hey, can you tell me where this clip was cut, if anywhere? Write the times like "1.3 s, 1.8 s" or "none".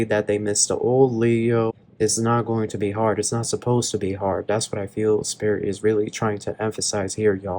1.7 s